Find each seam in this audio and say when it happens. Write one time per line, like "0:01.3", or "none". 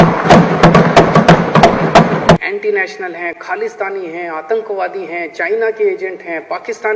0:02.4